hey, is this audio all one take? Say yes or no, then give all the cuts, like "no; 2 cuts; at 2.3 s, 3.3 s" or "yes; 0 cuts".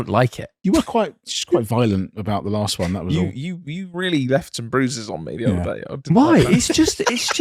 yes; 0 cuts